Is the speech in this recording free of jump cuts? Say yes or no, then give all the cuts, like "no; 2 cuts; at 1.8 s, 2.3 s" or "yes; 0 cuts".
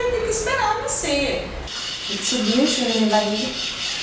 no; 1 cut; at 1.5 s